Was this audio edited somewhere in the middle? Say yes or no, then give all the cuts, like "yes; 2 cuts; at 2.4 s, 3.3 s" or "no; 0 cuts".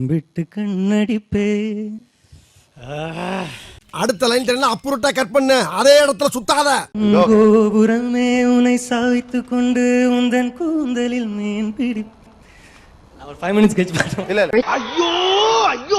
no; 0 cuts